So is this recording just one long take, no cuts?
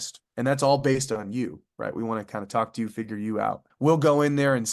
no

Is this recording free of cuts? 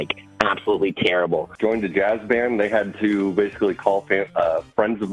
no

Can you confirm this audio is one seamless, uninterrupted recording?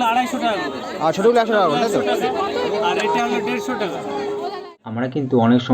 no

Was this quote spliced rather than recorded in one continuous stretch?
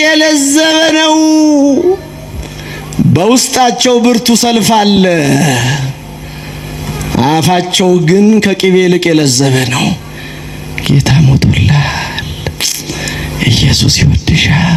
no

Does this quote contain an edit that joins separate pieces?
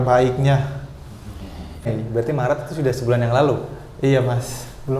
yes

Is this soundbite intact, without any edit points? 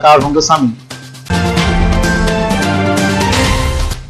yes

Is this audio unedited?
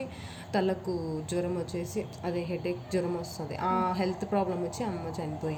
yes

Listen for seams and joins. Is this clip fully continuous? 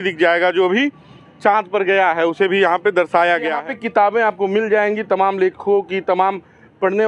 no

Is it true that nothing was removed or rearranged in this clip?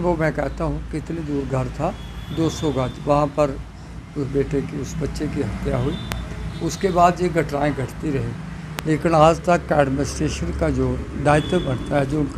yes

